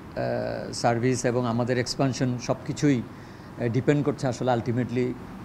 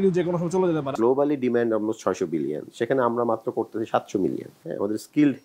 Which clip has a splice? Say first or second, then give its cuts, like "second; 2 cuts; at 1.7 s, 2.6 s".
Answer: second; 1 cut; at 0.9 s